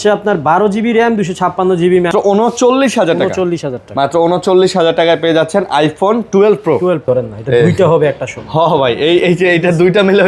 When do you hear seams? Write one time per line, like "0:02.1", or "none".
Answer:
0:02.1
0:07.1